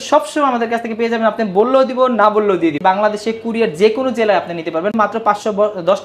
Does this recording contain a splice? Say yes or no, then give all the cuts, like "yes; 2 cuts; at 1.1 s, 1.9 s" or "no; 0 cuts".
yes; 2 cuts; at 2.8 s, 4.9 s